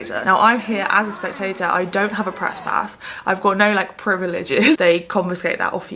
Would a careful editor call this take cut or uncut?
cut